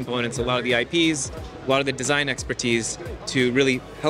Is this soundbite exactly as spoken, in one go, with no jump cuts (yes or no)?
yes